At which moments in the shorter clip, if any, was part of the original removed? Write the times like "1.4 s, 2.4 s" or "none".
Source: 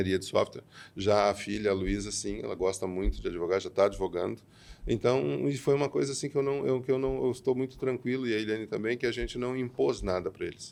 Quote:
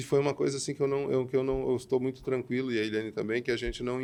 none